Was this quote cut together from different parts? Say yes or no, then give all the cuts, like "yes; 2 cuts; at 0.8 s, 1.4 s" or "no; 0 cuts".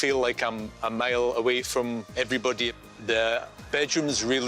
yes; 1 cut; at 2.7 s